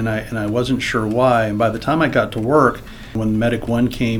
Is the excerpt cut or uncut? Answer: cut